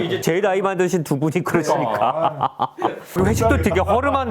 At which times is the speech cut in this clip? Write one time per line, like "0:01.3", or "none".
0:03.1